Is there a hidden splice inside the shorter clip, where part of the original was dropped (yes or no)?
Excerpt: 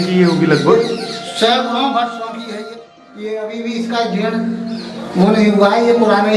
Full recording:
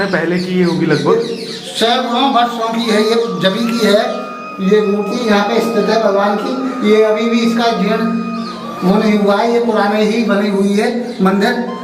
yes